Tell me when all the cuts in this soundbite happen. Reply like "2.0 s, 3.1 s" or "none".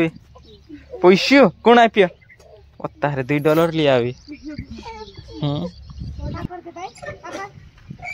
6.4 s